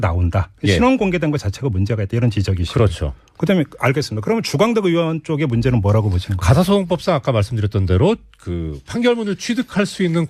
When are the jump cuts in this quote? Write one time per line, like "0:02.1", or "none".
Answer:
none